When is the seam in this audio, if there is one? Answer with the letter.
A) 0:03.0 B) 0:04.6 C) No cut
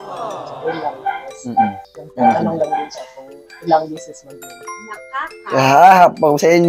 B